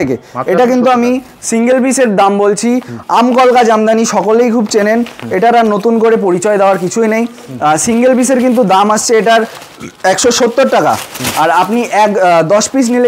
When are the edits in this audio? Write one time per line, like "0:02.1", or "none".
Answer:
none